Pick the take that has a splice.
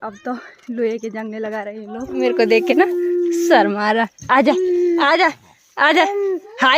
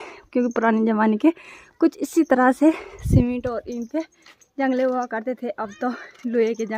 first; 1 cut; at 2.1 s

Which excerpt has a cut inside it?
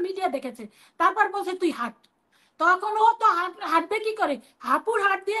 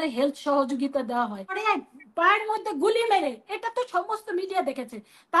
second; 1 cut; at 1.6 s

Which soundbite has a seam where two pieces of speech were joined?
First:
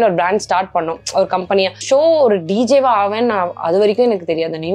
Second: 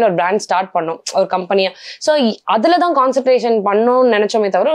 first; 1 cut; at 1.8 s

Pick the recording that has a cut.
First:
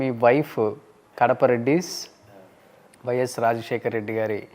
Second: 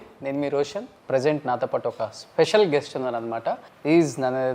second; 2 cuts; at 0.9 s, 3.7 s

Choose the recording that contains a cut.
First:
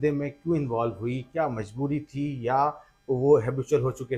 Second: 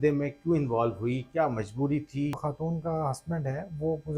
second; 1 cut; at 2.4 s

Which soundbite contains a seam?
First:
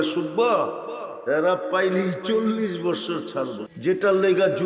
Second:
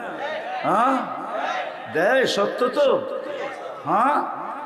first; 1 cut; at 3.7 s

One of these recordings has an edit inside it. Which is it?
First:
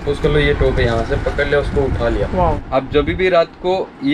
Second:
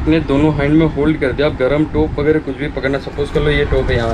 first; 1 cut; at 2.4 s

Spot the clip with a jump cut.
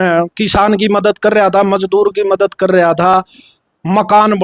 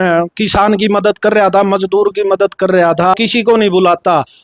second; 1 cut; at 3.1 s

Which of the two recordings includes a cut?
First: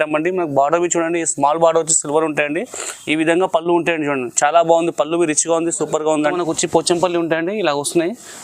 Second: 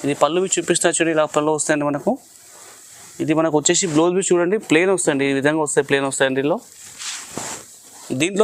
first; 1 cut; at 6.3 s

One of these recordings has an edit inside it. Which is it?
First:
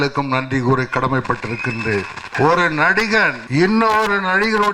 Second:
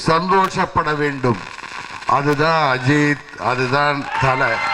first; 2 cuts; at 2.3 s, 3.4 s

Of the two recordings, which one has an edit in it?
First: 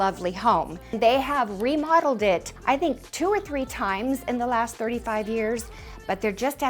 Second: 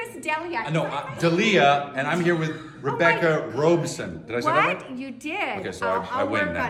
first; 2 cuts; at 1.0 s, 2.5 s

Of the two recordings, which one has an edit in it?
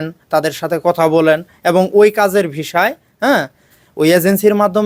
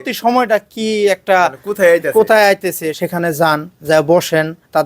second; 1 cut; at 2.9 s

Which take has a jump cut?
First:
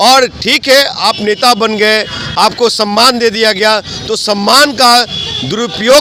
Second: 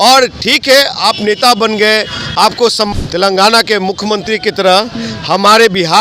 second; 1 cut; at 2.9 s

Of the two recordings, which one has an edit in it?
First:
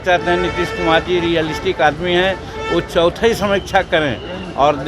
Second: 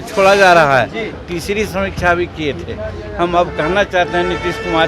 second; 1 cut; at 1.2 s

